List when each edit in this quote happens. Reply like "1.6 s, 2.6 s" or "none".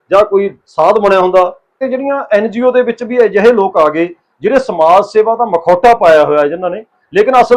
1.8 s